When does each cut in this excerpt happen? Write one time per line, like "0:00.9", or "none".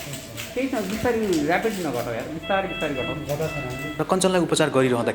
0:03.8

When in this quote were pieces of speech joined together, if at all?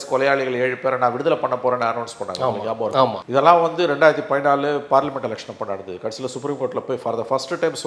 none

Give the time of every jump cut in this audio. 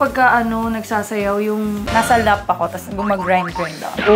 0:01.8

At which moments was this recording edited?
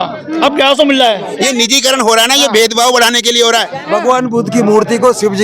0:01.3
0:03.8

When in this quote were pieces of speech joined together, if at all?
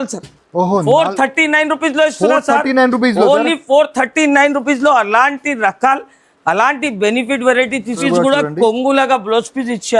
0:08.0

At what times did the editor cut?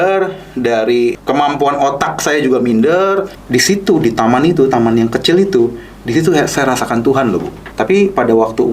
0:01.2
0:03.4
0:07.6

